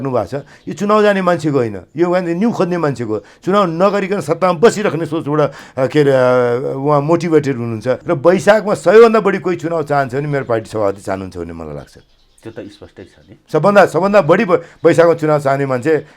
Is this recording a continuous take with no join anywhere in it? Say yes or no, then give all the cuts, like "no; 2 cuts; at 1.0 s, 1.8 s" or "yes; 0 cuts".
no; 1 cut; at 8.0 s